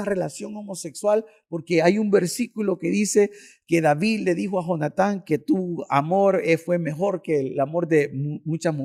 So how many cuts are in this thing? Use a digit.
0